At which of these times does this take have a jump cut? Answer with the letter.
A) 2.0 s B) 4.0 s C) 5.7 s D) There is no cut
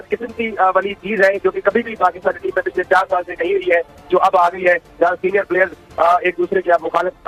D